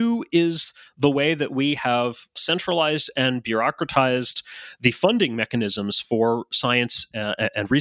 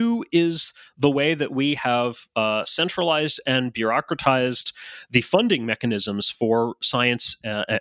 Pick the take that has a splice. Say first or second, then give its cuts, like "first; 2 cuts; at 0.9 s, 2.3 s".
first; 1 cut; at 2.3 s